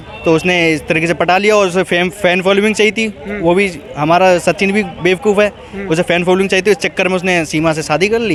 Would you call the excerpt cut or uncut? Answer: uncut